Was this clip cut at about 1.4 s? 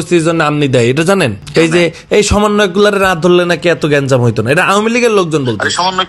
yes; 1 cut; at 1.4 s

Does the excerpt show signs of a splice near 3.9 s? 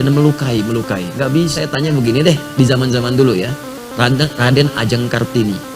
no; 1 cut; at 1.6 s

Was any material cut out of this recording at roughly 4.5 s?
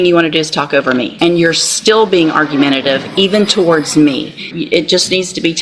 yes; 2 cuts; at 1.1 s, 4.5 s

